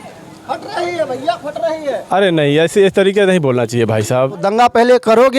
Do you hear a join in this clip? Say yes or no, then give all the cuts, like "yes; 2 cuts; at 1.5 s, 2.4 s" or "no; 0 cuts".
yes; 1 cut; at 4.4 s